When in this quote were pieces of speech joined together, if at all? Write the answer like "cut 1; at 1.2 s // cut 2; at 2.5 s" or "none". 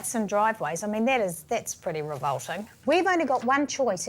cut 1; at 2.7 s